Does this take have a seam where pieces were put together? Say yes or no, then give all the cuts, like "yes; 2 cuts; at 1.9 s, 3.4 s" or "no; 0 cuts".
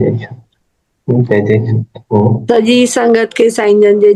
no; 0 cuts